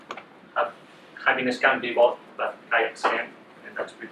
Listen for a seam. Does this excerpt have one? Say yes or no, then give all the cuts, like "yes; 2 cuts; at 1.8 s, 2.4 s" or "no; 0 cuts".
no; 0 cuts